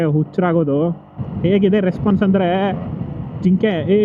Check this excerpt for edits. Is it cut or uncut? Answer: cut